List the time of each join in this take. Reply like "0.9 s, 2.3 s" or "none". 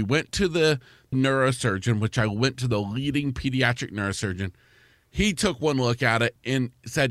1.1 s, 6.3 s